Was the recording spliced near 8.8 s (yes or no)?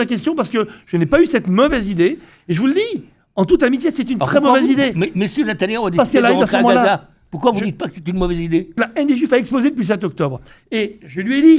yes